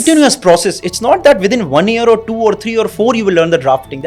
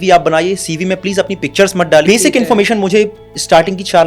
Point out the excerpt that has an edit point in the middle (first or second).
second